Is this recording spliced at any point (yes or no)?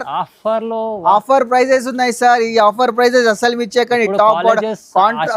no